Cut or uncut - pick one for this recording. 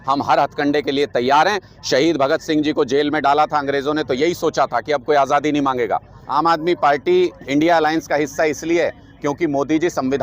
cut